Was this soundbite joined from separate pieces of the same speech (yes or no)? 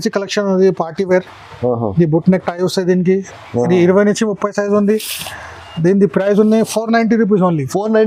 no